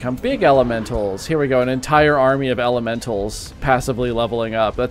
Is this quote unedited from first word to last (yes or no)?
yes